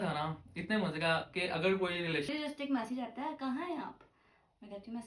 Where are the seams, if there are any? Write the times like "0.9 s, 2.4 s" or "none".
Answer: 2.3 s